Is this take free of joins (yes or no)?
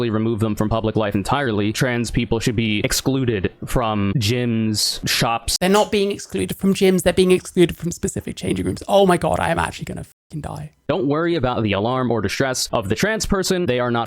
no